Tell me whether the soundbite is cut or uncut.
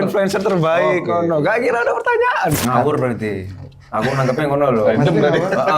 cut